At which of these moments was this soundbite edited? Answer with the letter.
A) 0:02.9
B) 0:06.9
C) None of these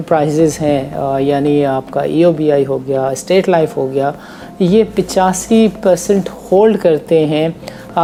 C